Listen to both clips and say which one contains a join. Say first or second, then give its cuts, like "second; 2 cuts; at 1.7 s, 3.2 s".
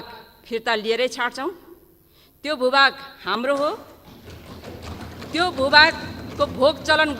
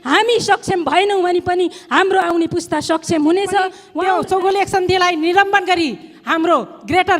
second; 1 cut; at 3.9 s